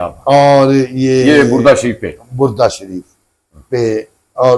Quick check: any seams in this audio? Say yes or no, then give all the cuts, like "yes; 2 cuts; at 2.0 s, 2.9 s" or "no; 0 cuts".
no; 0 cuts